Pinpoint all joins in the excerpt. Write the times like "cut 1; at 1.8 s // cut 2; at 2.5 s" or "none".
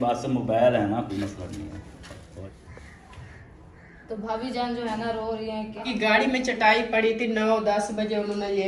cut 1; at 2.4 s // cut 2; at 5.8 s